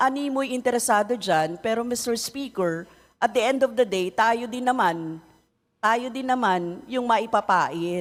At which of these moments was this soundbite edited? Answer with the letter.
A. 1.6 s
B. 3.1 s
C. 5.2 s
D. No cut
D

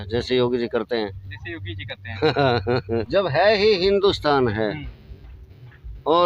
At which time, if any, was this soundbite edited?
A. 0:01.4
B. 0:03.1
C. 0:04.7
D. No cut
B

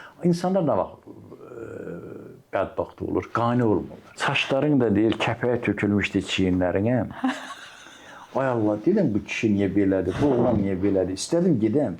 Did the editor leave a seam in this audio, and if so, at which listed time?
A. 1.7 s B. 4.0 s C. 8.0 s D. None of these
B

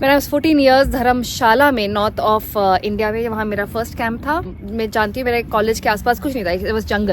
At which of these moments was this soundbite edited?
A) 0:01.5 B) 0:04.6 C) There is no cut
B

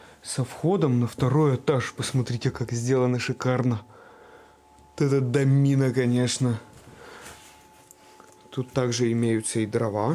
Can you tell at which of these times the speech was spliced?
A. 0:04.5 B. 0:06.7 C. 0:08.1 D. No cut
D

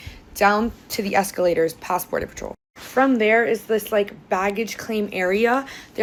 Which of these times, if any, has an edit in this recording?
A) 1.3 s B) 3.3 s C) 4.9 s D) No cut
D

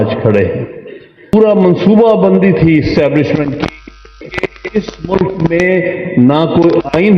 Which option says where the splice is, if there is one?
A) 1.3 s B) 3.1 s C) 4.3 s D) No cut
A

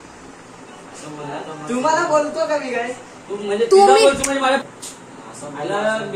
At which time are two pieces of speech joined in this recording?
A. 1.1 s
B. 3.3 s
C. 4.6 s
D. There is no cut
C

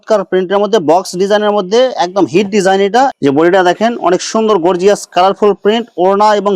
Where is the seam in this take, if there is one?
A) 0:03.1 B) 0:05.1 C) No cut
A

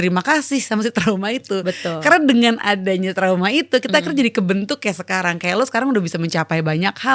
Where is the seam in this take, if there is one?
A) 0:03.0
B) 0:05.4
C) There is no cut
C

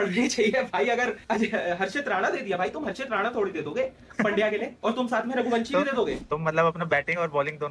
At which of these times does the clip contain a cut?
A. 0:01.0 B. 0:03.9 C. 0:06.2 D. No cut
C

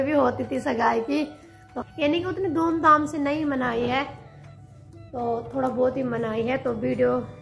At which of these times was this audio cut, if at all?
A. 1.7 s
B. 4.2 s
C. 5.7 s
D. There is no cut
A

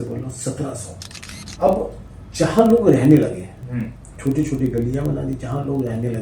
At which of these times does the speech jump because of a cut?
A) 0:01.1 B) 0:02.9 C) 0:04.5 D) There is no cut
A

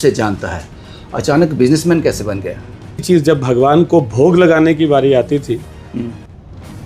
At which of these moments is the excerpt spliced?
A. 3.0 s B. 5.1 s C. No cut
A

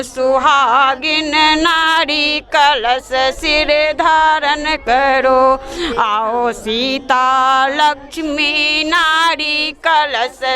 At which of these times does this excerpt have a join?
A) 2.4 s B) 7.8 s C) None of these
C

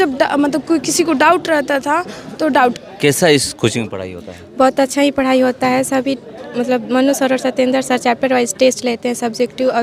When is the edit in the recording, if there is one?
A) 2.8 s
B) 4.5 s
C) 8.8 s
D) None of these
A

